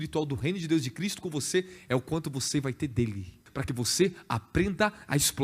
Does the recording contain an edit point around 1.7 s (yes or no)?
no